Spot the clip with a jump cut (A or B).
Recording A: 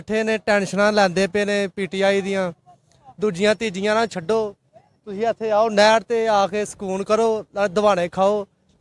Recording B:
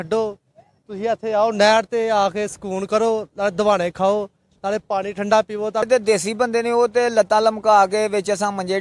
B